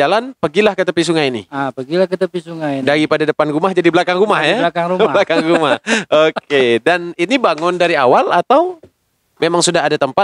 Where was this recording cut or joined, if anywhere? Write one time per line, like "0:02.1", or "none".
none